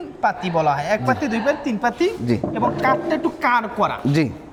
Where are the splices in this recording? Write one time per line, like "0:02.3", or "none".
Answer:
none